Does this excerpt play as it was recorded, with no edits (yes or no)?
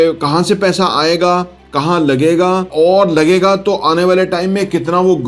no